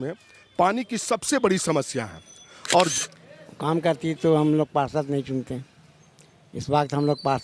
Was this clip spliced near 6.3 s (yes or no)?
no